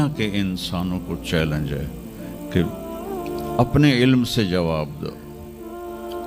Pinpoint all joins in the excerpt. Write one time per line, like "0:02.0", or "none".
none